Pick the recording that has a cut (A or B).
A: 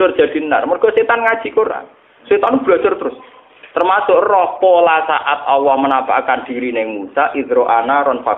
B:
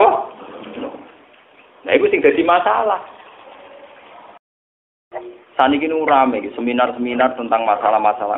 B